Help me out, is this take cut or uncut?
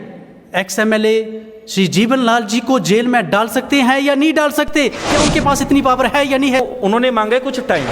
cut